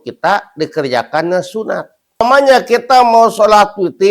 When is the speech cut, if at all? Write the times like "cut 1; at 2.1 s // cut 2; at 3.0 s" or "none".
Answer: cut 1; at 2.2 s